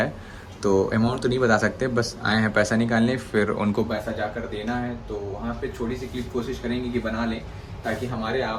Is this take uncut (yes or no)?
yes